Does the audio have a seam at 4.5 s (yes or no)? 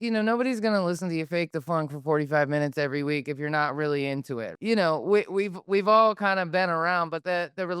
yes